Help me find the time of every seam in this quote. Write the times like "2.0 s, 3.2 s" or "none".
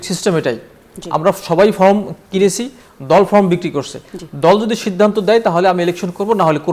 none